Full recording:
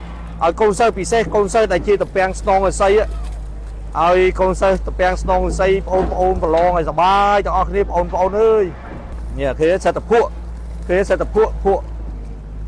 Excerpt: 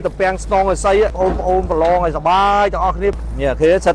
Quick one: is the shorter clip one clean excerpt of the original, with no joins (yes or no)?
no